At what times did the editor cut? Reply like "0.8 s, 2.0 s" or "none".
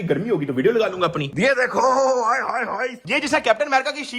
1.3 s, 3.0 s